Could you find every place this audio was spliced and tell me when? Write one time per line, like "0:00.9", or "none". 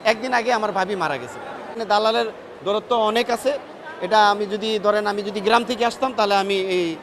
0:01.8